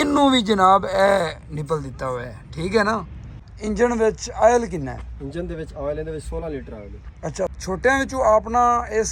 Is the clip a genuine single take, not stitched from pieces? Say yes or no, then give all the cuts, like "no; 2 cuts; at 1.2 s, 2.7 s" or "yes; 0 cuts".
no; 2 cuts; at 3.2 s, 7.6 s